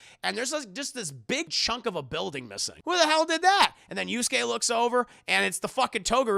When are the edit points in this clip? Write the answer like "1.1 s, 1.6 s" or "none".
1.5 s, 2.7 s